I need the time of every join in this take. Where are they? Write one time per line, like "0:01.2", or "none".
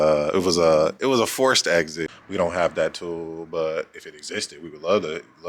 0:02.1